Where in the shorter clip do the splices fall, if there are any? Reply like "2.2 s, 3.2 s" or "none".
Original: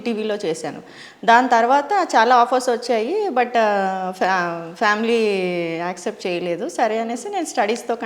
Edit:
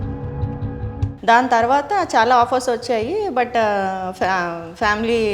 none